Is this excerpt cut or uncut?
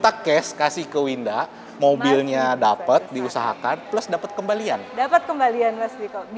uncut